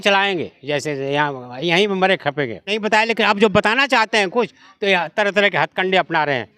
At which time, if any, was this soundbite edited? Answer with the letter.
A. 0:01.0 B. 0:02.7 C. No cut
B